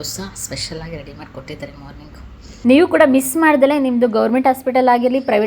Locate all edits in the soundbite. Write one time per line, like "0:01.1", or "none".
0:02.6